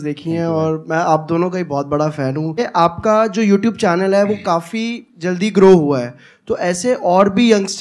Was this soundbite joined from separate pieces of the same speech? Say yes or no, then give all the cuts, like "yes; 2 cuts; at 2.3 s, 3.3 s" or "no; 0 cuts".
yes; 1 cut; at 2.6 s